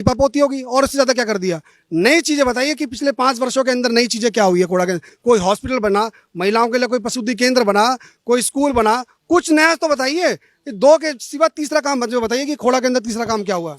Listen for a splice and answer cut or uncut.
uncut